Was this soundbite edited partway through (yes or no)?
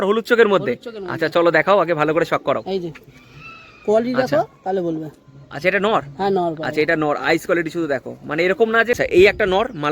yes